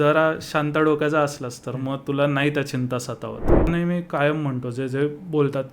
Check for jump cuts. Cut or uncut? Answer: cut